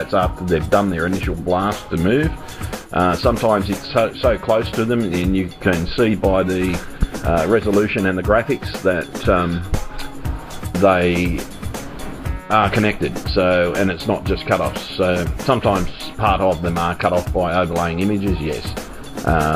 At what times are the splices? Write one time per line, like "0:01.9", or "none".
0:04.2